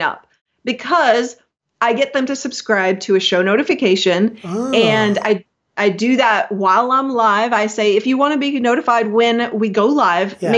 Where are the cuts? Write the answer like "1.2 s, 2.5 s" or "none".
none